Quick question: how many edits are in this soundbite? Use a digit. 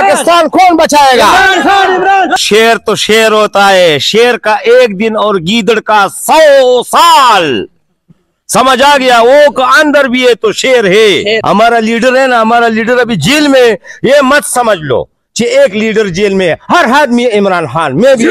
1